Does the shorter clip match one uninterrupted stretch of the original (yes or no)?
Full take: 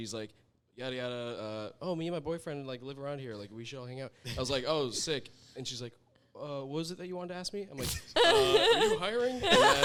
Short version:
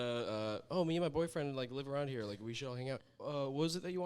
no